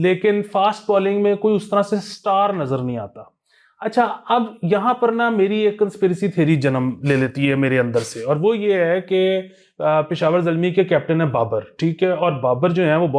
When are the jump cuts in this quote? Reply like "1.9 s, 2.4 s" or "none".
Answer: none